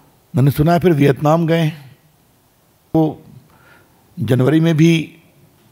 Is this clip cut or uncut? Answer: cut